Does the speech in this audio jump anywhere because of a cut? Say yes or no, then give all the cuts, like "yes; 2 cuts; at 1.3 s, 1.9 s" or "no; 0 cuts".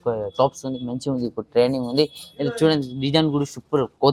no; 0 cuts